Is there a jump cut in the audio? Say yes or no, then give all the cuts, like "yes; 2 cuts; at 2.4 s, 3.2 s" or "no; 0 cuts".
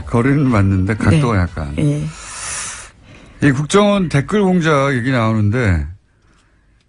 no; 0 cuts